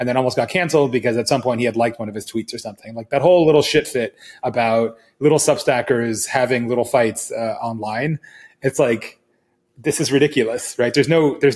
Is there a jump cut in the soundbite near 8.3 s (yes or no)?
no